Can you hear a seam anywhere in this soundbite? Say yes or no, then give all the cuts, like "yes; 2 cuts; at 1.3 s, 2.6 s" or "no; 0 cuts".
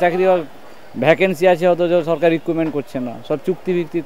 no; 0 cuts